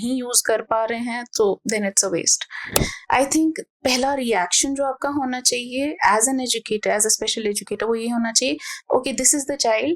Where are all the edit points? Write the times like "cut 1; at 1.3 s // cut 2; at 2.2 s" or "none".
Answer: cut 1; at 2.7 s